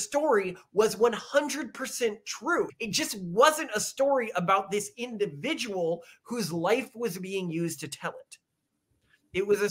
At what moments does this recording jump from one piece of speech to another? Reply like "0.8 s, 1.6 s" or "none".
2.7 s